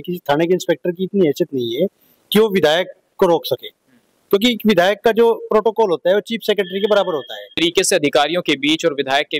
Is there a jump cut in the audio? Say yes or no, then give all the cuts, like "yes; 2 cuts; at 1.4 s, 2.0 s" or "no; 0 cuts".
yes; 1 cut; at 7.6 s